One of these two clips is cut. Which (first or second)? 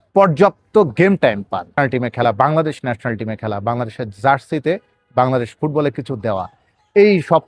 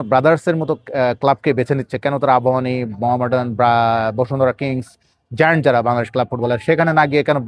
first